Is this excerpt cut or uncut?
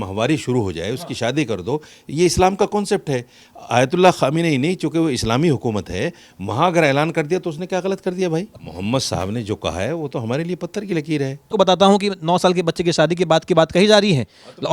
cut